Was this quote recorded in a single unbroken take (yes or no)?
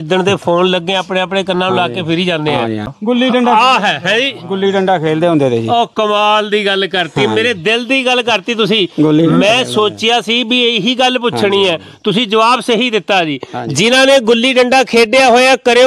no